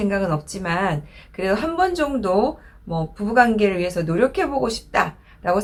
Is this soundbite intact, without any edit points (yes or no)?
yes